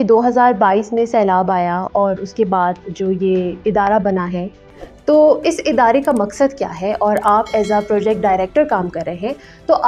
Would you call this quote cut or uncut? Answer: uncut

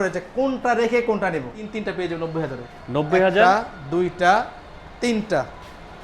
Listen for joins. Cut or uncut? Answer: cut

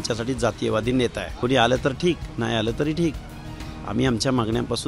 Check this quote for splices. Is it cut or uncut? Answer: cut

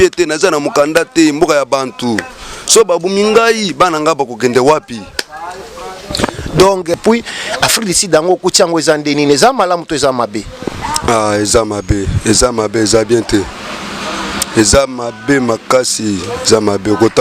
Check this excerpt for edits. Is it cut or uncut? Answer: cut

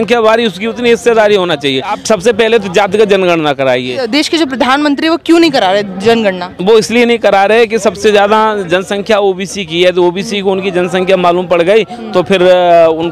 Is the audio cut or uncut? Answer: cut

